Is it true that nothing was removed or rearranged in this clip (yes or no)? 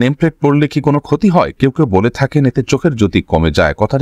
yes